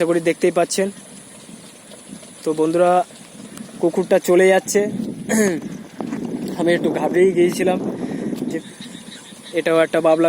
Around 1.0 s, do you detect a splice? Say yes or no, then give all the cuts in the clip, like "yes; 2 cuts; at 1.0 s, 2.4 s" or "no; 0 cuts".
no; 1 cut; at 8.6 s